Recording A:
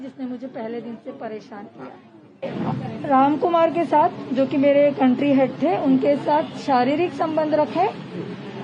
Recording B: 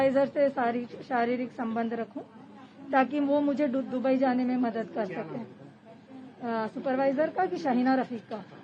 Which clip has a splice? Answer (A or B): A